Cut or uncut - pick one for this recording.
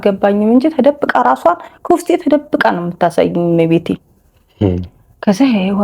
uncut